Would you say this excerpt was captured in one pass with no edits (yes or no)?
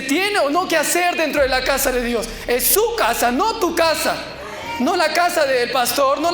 yes